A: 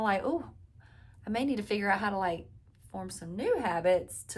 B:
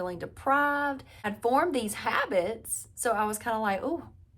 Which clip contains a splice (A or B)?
B